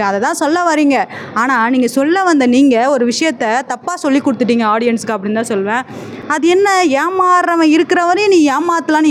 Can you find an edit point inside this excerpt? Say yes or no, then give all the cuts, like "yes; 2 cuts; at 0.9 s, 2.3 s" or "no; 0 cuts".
no; 0 cuts